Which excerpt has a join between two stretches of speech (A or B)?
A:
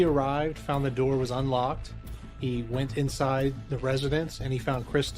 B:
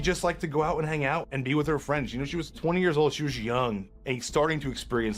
B